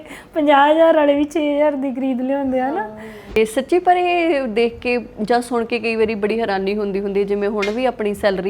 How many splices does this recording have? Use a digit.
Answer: 1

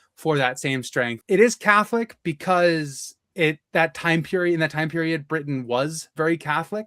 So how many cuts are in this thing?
1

